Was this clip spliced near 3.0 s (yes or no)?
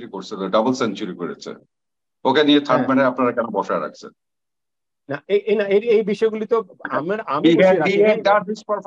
no